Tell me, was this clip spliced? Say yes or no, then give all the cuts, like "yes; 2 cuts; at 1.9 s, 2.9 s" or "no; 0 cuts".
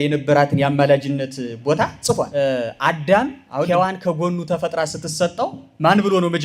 yes; 1 cut; at 2.3 s